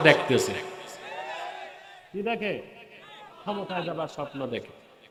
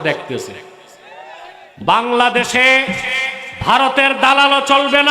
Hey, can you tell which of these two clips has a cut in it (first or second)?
second